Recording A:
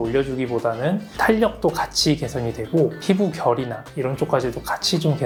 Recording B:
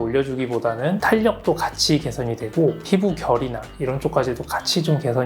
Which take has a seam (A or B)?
B